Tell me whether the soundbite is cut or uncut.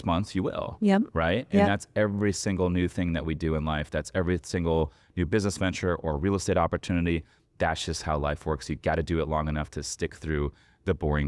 uncut